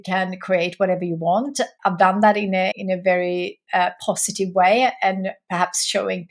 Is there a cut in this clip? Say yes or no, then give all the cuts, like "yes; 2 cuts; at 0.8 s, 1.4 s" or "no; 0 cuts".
yes; 2 cuts; at 1.7 s, 2.8 s